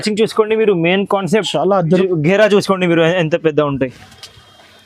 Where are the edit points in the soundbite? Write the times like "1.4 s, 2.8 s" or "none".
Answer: 2.0 s